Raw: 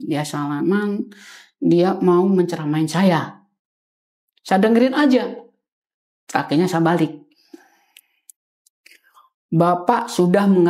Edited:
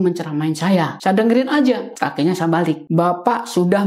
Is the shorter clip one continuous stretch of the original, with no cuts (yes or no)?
no